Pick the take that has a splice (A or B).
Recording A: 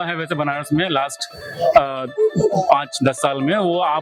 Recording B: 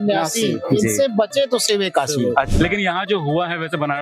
B